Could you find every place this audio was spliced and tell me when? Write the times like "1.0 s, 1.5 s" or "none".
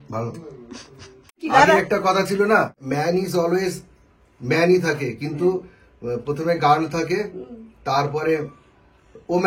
1.4 s, 2.8 s